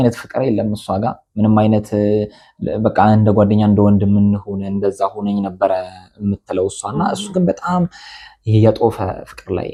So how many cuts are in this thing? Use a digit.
0